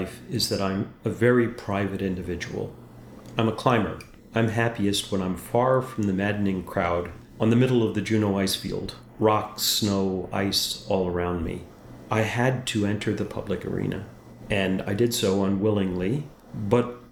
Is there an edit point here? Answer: no; 0 cuts

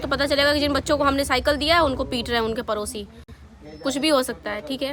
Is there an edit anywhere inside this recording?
no; 0 cuts

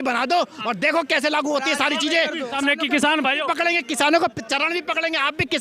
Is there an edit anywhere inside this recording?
yes; 1 cut; at 2.6 s

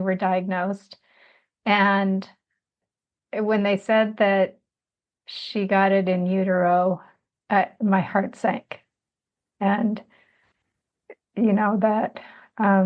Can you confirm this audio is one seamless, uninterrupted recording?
no; 1 cut; at 2.9 s

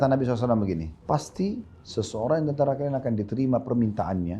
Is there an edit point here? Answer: yes; 1 cut; at 0.9 s

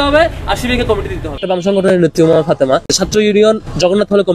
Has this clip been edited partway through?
yes; 2 cuts; at 1.4 s, 3.0 s

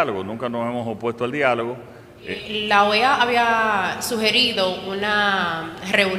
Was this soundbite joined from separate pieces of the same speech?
yes; 1 cut; at 2.6 s

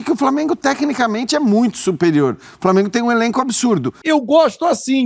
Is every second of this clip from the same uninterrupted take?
no; 1 cut; at 3.9 s

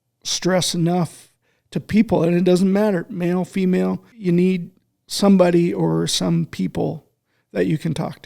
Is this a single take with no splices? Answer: no; 1 cut; at 4.1 s

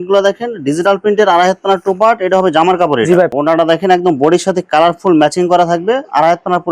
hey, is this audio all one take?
no; 1 cut; at 3.3 s

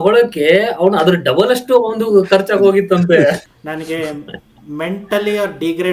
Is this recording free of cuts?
no; 1 cut; at 3.4 s

